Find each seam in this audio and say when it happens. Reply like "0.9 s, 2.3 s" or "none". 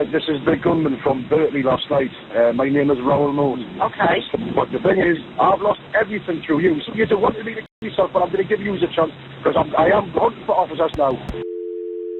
3.7 s, 6.9 s, 11.3 s